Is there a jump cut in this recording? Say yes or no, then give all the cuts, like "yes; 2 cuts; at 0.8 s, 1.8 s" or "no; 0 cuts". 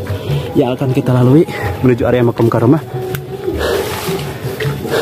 no; 0 cuts